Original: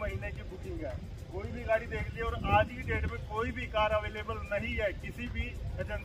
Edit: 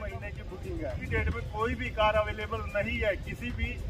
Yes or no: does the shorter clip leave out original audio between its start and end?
yes